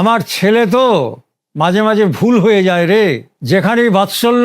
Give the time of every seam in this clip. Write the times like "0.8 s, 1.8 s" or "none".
3.3 s